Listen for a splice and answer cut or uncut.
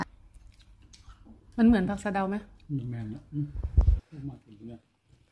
uncut